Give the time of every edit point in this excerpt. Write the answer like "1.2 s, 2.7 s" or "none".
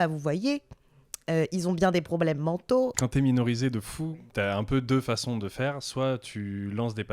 2.9 s, 4.1 s